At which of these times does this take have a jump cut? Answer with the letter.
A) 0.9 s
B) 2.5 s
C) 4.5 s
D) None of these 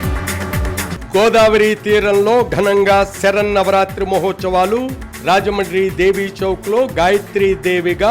A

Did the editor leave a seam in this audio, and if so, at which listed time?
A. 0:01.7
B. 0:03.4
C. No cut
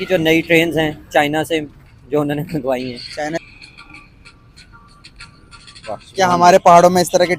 B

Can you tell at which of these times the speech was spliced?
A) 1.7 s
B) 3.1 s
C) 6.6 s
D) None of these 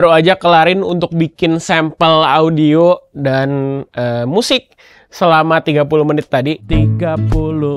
C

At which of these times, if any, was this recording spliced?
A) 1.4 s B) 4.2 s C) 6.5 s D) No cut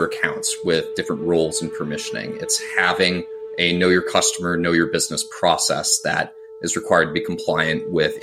D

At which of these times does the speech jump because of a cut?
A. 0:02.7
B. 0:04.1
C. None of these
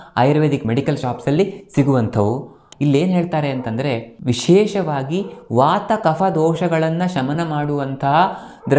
A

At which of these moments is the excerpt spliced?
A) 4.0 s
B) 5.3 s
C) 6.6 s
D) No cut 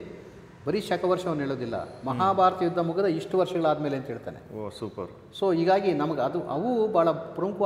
D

